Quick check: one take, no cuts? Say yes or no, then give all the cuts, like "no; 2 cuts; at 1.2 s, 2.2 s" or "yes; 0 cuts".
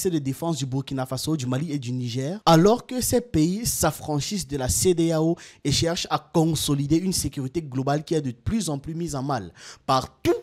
yes; 0 cuts